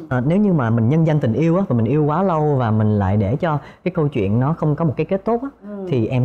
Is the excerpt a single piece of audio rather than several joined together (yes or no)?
yes